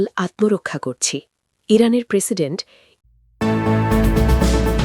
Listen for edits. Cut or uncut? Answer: cut